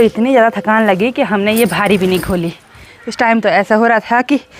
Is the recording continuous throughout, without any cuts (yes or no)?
yes